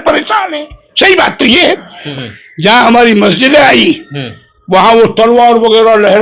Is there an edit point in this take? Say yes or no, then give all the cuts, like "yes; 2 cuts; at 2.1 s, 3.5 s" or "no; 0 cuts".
yes; 1 cut; at 2.0 s